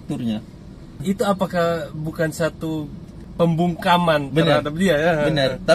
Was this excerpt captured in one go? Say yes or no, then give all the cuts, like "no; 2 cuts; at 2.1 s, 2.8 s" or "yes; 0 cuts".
no; 2 cuts; at 1.0 s, 3.2 s